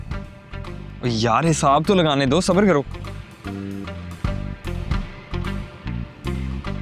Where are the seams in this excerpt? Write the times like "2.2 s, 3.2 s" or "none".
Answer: none